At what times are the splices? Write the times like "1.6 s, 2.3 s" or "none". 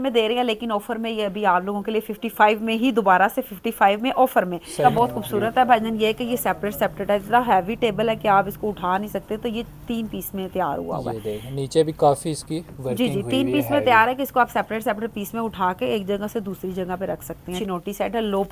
4.8 s, 17.6 s